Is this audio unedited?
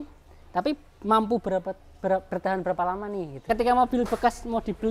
no; 1 cut; at 3.4 s

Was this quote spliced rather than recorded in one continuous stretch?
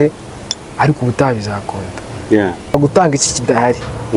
yes; 1 cut; at 2.7 s

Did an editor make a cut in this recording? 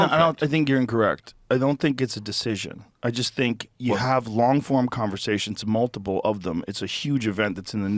no; 0 cuts

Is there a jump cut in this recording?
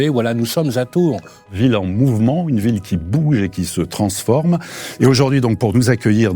yes; 2 cuts; at 1.5 s, 4.8 s

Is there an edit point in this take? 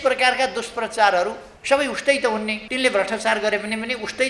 yes; 2 cuts; at 1.5 s, 2.6 s

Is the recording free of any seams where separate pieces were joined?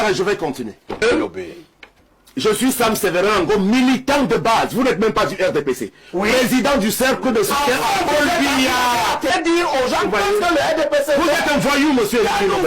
no; 2 cuts; at 1.0 s, 9.3 s

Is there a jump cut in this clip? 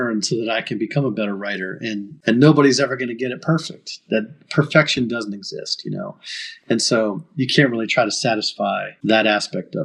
yes; 2 cuts; at 2.1 s, 8.9 s

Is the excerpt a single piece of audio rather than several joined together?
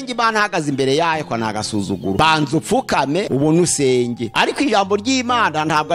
no; 3 cuts; at 2.2 s, 3.3 s, 4.2 s

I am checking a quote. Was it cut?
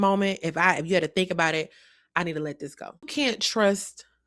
yes; 1 cut; at 3.1 s

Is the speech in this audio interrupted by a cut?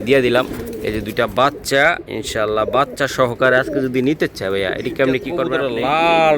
yes; 1 cut; at 5.5 s

